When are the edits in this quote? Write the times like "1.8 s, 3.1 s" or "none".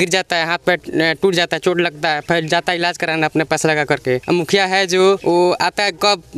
4.2 s